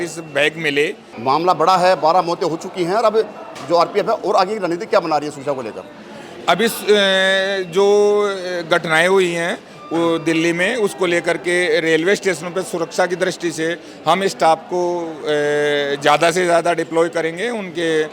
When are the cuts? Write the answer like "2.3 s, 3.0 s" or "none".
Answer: 1.1 s